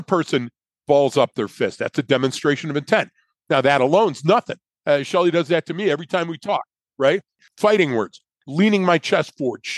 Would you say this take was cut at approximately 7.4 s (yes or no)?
yes